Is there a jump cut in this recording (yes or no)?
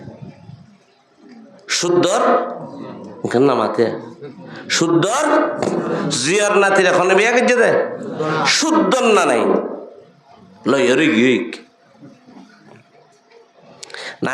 no